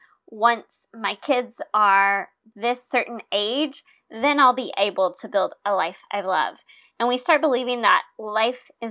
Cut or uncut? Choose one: uncut